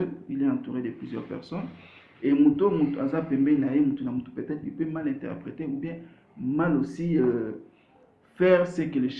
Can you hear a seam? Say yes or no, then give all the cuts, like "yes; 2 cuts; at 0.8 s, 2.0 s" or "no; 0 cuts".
no; 0 cuts